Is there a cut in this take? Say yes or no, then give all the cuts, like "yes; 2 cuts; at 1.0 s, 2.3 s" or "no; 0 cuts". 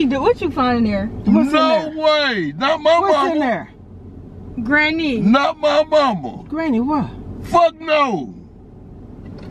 no; 0 cuts